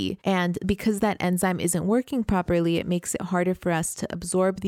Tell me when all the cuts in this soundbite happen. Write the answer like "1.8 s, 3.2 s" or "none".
none